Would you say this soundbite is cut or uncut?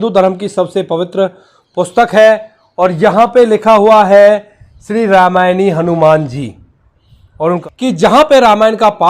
cut